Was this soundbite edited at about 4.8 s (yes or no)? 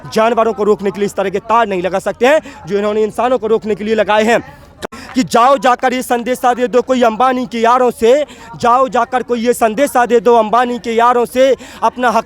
yes